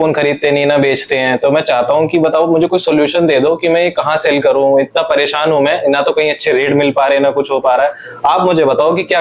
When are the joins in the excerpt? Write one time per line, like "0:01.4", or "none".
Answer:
none